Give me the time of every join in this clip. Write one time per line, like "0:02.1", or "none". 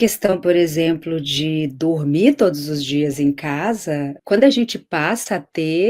0:04.1